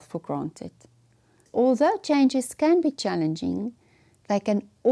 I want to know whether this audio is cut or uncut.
cut